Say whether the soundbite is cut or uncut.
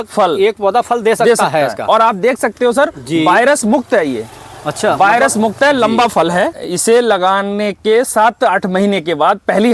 cut